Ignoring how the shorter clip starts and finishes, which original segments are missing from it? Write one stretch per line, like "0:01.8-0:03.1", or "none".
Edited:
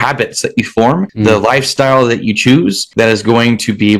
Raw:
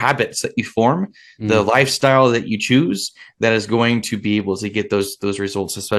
0:01.1-0:01.4
0:03.1-0:03.3